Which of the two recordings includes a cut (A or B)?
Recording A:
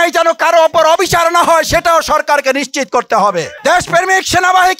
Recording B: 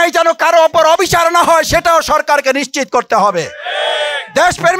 A